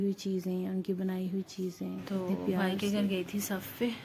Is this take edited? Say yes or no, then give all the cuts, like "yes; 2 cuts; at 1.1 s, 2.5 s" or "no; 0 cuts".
no; 0 cuts